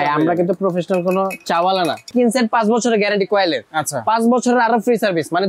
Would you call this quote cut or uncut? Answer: cut